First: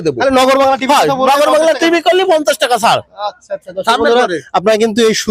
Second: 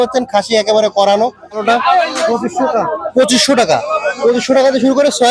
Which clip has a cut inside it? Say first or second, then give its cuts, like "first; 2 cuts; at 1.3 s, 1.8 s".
second; 1 cut; at 1.6 s